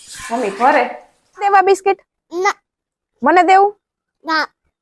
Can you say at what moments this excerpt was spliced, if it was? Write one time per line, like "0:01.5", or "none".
0:01.4